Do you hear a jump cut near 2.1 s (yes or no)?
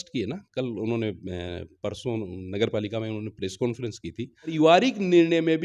no